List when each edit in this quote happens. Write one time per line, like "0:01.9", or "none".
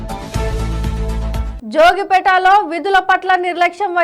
0:01.5